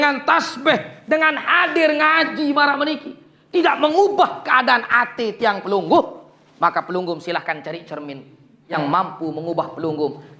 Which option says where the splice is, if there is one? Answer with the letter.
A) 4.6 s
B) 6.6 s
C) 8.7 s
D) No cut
C